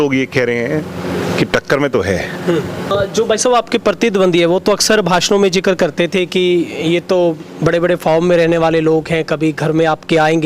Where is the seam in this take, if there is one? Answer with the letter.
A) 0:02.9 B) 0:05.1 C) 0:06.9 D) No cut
A